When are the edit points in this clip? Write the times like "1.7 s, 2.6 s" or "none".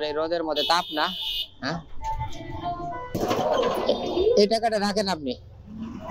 3.1 s